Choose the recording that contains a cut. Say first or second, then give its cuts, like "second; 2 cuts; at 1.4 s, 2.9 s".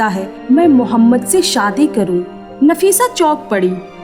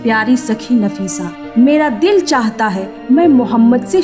first; 1 cut; at 2.4 s